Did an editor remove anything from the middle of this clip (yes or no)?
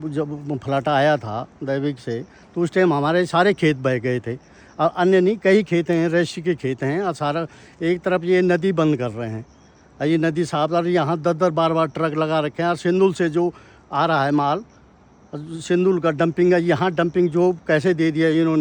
no